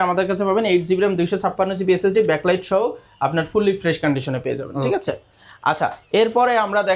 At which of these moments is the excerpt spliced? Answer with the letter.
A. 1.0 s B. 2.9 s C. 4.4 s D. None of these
D